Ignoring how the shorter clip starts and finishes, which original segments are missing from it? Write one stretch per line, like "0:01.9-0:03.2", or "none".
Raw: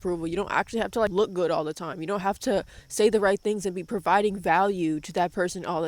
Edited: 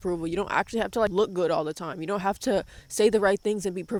none

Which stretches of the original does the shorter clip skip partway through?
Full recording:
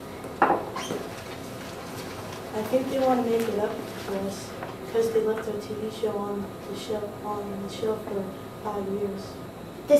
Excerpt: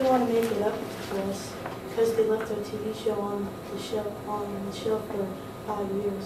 none

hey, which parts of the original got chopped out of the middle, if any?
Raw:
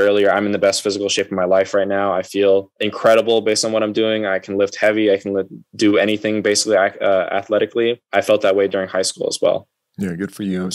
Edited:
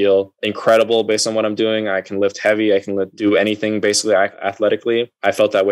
0:05.5-0:05.7
0:07.0-0:07.3

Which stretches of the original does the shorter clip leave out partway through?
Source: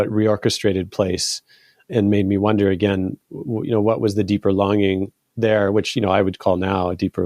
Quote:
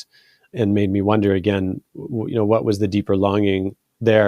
none

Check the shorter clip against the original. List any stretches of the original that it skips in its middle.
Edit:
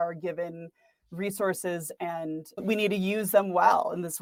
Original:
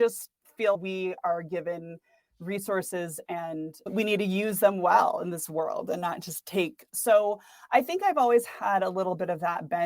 none

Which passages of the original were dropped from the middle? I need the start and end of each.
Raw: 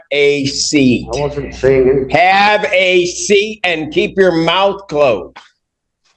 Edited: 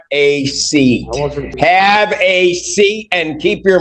0:01.5-0:02.1

